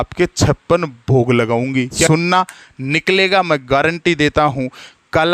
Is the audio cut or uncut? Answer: cut